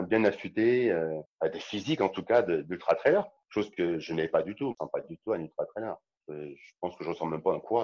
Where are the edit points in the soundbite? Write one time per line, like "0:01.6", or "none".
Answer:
0:01.2
0:03.3
0:04.8
0:06.1